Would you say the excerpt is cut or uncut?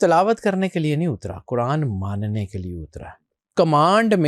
cut